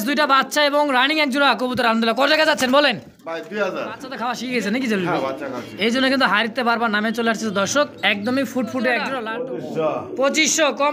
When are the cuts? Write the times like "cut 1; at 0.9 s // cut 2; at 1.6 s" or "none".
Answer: cut 1; at 4.1 s // cut 2; at 9.1 s